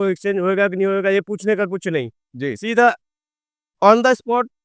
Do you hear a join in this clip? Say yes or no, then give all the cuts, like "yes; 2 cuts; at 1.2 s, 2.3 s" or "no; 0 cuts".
no; 0 cuts